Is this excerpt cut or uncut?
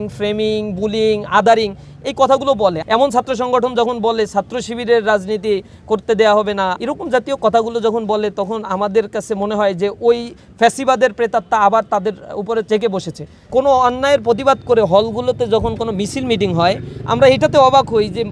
cut